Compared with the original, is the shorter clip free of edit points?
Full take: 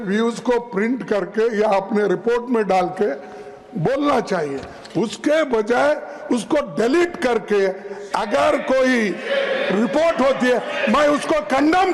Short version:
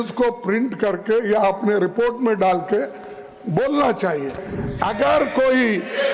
no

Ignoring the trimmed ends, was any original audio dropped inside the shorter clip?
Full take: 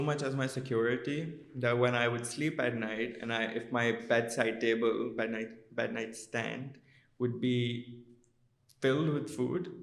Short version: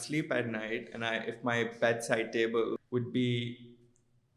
yes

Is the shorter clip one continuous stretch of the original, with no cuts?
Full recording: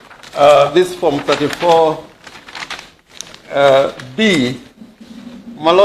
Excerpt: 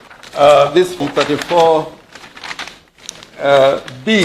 no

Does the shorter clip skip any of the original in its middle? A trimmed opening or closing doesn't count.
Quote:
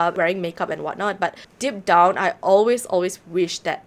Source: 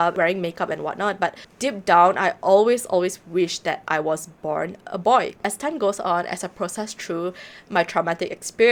no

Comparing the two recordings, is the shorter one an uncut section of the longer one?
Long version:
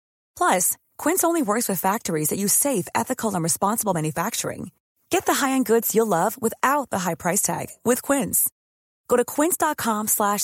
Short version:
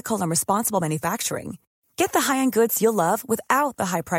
yes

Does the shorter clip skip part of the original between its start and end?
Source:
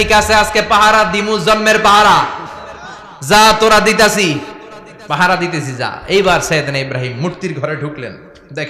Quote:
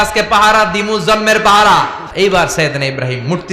yes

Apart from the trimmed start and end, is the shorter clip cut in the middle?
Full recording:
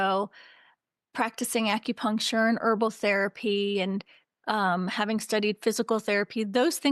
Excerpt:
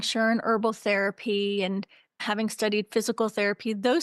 yes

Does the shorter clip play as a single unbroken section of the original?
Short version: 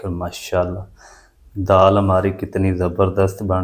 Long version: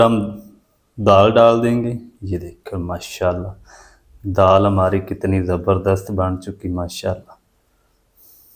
yes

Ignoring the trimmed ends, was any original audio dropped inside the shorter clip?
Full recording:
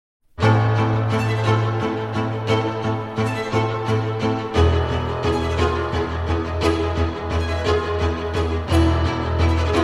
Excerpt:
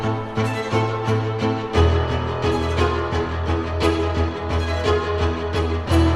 no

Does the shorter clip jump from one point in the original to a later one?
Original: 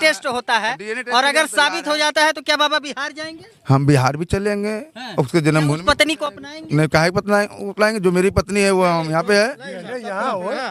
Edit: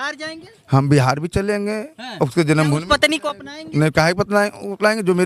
no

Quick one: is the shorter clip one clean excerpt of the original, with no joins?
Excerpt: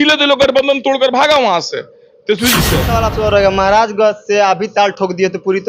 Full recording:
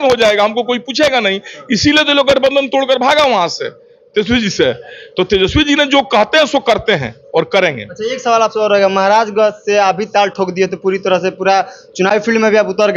no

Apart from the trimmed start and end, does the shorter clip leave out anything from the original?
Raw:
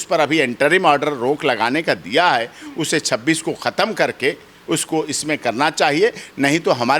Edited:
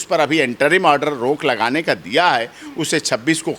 no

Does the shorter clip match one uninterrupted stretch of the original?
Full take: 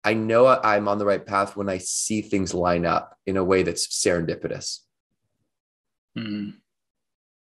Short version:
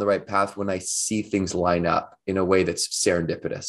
yes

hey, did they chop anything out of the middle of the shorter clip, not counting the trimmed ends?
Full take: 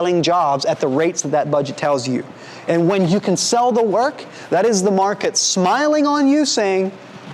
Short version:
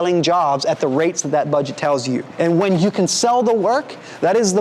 yes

